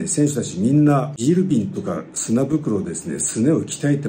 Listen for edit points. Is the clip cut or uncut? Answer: cut